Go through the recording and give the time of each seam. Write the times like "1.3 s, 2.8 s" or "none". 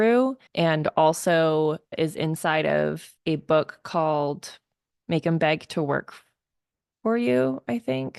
none